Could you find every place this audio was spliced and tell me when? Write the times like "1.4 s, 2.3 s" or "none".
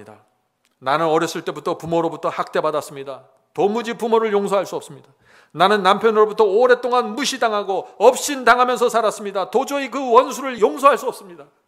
10.5 s

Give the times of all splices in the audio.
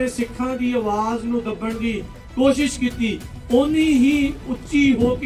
none

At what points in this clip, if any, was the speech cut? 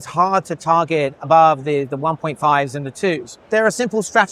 3.4 s

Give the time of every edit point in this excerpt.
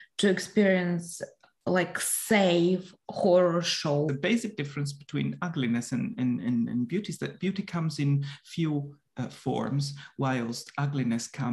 4.1 s

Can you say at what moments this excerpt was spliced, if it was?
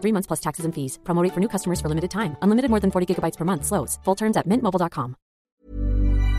5.5 s

